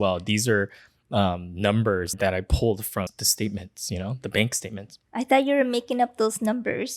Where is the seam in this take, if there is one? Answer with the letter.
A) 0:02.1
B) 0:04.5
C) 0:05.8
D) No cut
A